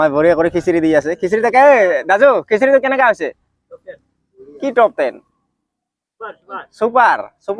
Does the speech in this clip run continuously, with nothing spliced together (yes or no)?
yes